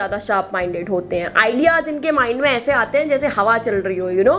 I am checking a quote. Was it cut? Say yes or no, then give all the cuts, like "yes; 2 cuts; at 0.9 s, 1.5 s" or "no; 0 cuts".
no; 0 cuts